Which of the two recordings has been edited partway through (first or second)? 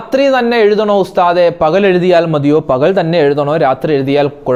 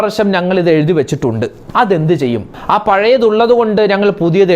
second